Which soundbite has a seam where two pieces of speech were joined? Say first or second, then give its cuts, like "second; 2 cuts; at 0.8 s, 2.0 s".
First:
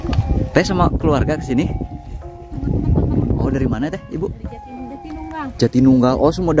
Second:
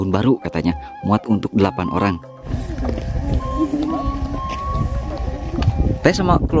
second; 1 cut; at 2.5 s